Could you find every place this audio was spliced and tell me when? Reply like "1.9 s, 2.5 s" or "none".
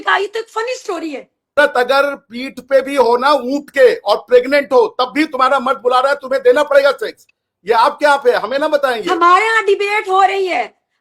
1.6 s